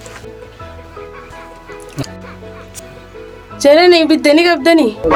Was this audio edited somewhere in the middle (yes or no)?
no